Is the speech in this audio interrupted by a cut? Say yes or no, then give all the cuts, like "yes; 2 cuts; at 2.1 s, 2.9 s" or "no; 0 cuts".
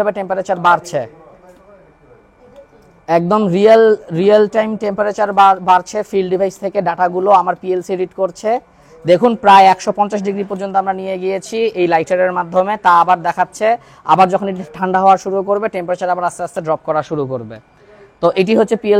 no; 0 cuts